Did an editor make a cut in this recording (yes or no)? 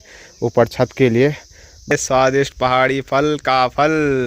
yes